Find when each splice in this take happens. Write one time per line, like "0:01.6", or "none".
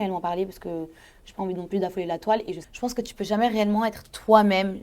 0:02.6

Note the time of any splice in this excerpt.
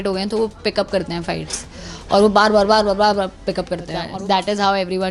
0:04.0

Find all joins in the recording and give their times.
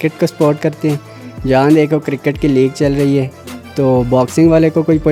none

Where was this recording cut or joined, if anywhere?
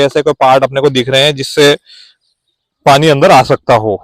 none

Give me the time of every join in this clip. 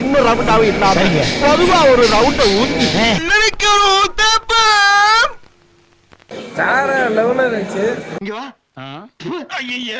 0:03.2
0:06.4

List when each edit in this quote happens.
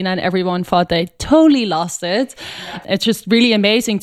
0:02.5

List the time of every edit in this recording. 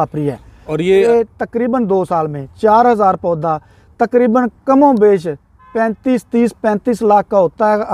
0:01.1

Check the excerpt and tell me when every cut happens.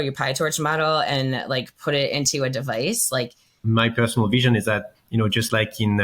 0:03.6

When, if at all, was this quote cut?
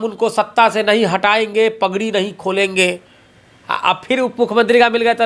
none

